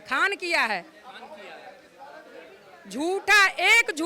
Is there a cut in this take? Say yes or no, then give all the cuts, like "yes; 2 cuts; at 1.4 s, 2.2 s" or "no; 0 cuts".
no; 0 cuts